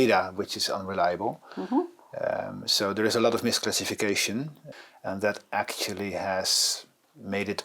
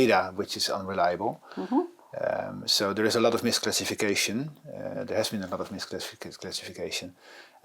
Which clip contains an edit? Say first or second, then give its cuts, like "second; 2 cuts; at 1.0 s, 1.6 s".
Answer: first; 1 cut; at 4.6 s